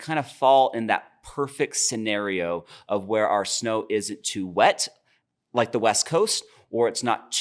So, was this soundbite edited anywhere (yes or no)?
no